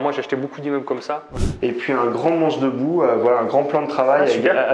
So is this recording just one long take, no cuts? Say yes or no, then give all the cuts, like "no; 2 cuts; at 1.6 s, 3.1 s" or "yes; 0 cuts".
no; 1 cut; at 1.3 s